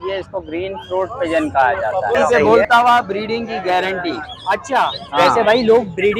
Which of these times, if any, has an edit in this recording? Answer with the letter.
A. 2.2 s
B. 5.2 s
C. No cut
A